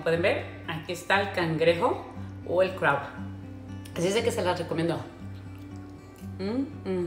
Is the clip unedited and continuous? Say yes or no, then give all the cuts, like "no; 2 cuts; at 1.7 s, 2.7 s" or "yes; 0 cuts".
no; 2 cuts; at 5.1 s, 6.4 s